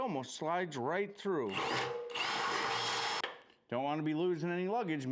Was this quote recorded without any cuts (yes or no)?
no